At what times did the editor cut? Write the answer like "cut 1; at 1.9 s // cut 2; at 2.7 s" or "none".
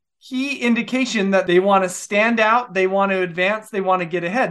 cut 1; at 1.4 s